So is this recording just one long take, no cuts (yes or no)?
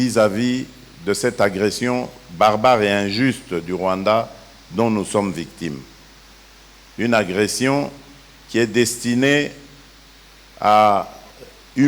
yes